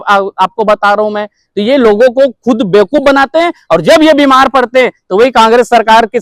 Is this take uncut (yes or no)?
yes